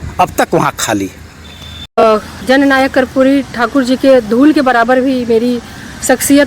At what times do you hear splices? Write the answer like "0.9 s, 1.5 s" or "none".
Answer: 2.0 s